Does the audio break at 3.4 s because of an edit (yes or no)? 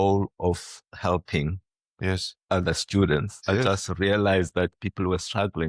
yes